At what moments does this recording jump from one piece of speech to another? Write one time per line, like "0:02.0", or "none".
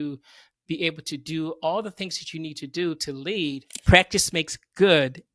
0:03.7